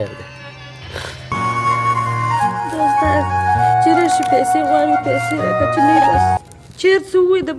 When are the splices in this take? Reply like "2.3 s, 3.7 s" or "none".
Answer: none

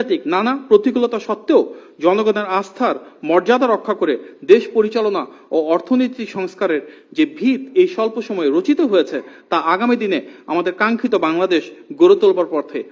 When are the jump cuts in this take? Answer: none

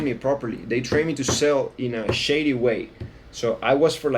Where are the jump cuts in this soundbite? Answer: none

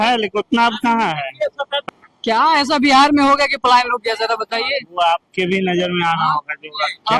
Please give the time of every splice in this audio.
1.8 s

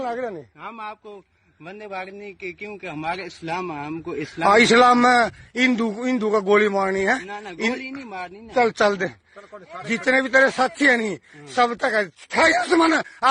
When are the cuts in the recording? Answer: none

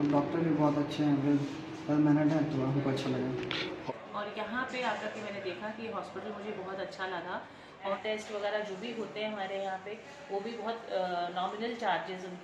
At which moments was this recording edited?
3.8 s, 8.0 s

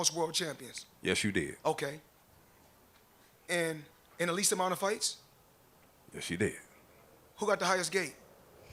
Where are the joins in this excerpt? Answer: none

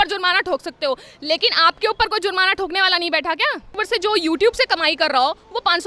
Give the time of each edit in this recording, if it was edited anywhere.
3.8 s

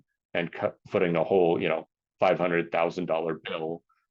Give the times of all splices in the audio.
none

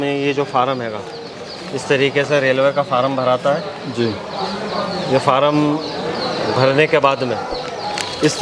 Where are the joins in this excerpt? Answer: none

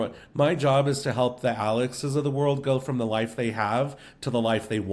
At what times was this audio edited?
none

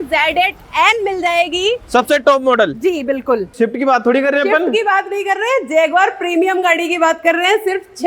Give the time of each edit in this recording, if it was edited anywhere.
3.5 s

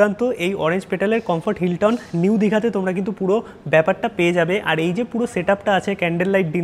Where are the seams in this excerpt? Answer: none

